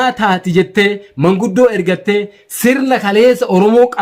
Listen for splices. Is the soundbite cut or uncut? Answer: uncut